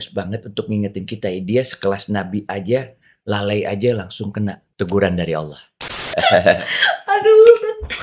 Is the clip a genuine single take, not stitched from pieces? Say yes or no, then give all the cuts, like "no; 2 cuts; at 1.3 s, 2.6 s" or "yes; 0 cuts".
no; 2 cuts; at 4.6 s, 5.9 s